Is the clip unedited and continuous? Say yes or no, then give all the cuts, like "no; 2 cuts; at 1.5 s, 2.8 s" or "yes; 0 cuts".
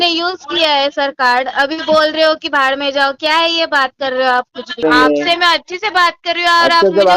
no; 1 cut; at 4.8 s